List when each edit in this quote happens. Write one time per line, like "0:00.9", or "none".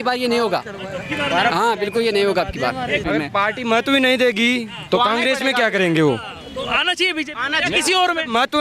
0:03.0